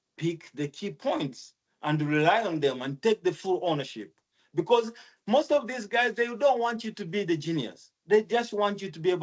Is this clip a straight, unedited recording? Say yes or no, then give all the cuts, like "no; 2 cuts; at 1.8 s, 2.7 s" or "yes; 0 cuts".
yes; 0 cuts